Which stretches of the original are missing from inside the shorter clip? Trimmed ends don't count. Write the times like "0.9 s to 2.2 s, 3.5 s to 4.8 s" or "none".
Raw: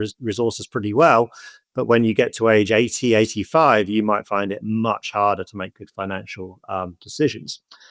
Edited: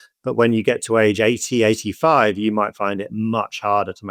none